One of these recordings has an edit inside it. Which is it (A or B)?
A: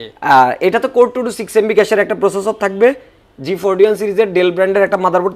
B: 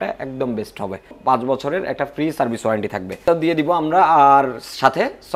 B